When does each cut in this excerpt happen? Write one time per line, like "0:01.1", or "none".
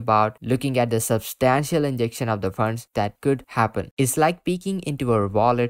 none